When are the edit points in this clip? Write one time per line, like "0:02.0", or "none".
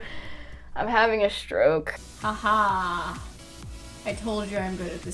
0:02.1